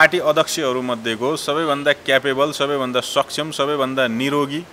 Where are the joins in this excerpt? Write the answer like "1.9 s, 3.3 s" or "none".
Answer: none